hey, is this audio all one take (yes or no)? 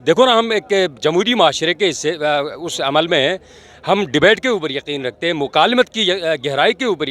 yes